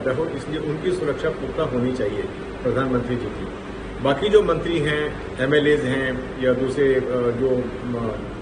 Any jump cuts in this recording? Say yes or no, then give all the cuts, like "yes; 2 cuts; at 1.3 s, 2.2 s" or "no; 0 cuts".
no; 0 cuts